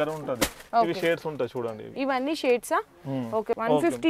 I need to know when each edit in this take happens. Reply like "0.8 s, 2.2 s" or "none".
none

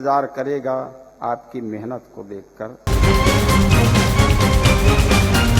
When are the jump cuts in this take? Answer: 2.9 s

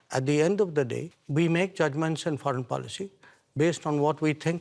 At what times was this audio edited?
1.1 s

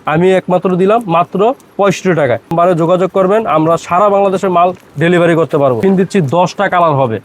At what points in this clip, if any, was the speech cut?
2.5 s, 5.8 s

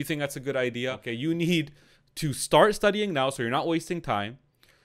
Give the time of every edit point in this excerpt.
1.0 s

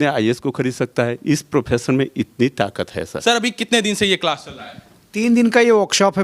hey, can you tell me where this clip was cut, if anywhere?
none

